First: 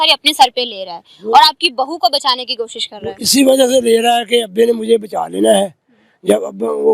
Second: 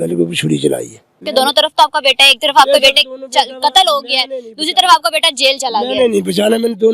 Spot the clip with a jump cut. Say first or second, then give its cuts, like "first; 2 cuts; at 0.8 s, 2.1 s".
second; 1 cut; at 1.2 s